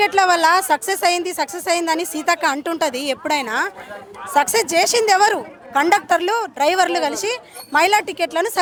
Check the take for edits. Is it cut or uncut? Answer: uncut